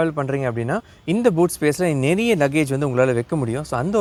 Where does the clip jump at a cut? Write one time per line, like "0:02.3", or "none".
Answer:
none